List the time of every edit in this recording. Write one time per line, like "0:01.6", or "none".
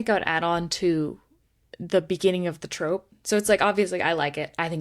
0:03.1